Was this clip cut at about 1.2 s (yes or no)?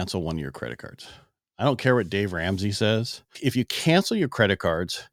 no